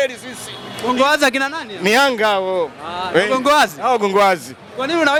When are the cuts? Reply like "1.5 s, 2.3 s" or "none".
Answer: none